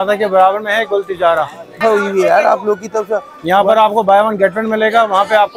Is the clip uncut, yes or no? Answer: no